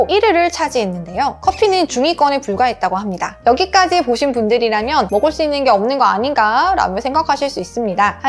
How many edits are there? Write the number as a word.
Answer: one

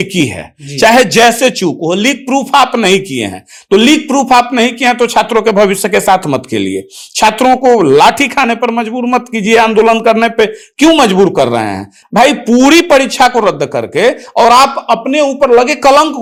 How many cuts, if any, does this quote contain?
zero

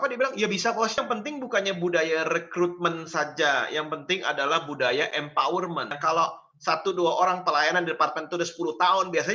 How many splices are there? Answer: two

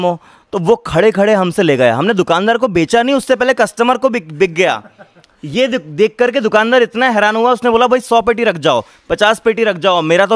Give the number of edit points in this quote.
zero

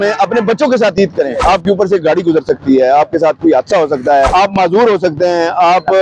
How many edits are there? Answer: two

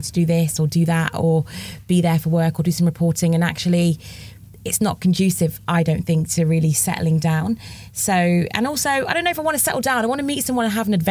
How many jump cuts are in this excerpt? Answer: zero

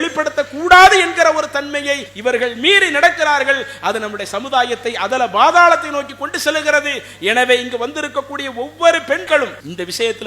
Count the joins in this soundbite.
two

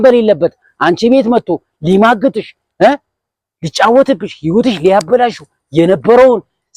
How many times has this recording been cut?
zero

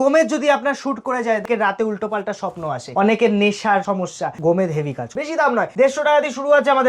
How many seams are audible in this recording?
four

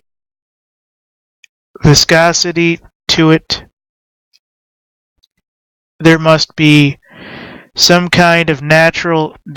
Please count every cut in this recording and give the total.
one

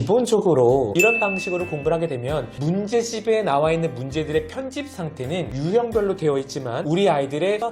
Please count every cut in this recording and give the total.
one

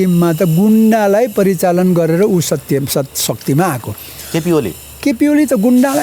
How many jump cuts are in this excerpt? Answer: zero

